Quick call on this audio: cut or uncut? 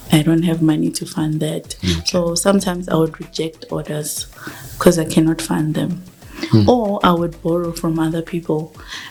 uncut